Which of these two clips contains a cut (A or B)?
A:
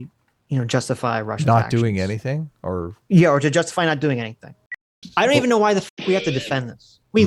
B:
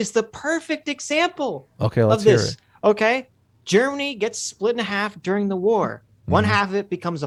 A